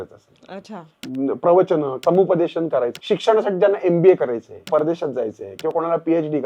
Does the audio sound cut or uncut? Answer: cut